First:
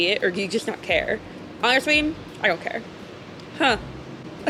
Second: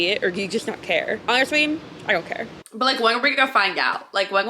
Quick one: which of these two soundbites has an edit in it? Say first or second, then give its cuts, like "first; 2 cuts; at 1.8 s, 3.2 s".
second; 2 cuts; at 1.2 s, 2.6 s